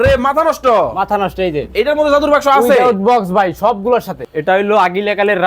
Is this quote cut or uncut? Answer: cut